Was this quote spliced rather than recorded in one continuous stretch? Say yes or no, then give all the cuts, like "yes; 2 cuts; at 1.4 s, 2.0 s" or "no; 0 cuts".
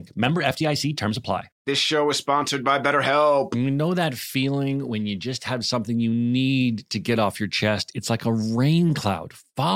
no; 0 cuts